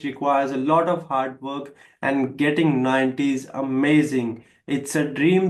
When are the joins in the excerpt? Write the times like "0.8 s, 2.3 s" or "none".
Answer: none

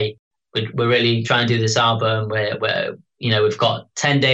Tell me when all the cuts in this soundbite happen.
1.2 s

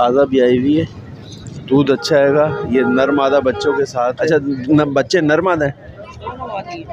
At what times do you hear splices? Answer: 4.2 s

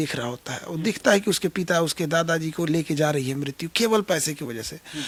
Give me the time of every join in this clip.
none

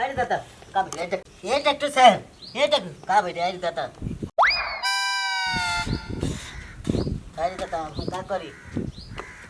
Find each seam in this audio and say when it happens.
1.2 s

